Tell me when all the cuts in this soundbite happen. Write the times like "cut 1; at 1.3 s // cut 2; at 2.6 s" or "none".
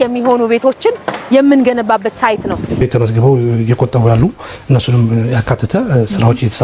cut 1; at 2.8 s